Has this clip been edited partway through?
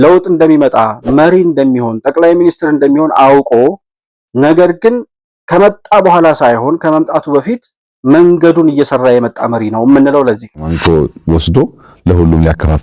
yes; 1 cut; at 10.7 s

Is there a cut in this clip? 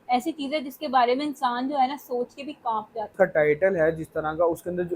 yes; 1 cut; at 3.1 s

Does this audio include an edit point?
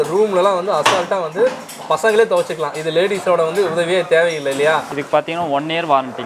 yes; 1 cut; at 4.9 s

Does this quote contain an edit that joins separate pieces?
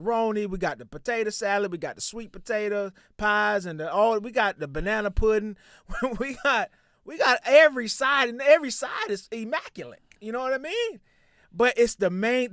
no; 0 cuts

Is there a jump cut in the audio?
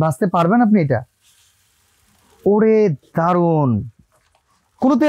no; 0 cuts

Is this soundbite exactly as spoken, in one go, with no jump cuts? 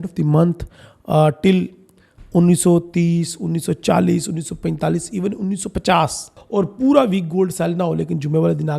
no; 1 cut; at 6.3 s

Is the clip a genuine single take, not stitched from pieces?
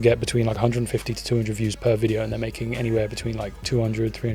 yes; 0 cuts

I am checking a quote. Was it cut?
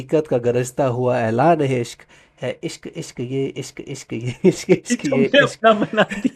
no; 0 cuts

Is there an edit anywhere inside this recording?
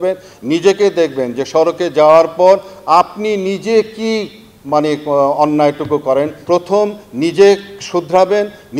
yes; 1 cut; at 6.4 s

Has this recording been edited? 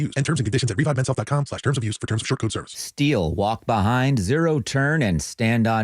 yes; 1 cut; at 2.8 s

